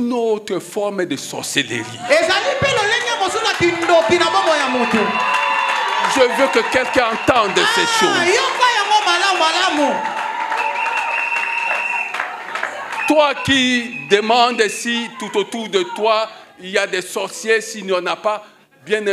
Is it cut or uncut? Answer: uncut